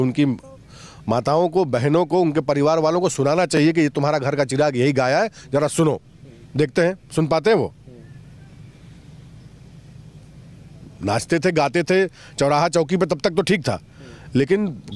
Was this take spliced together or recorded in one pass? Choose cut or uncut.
uncut